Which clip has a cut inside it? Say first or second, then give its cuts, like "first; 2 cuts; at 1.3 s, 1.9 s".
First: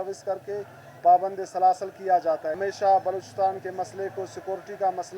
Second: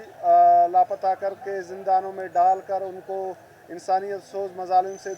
first; 1 cut; at 2.6 s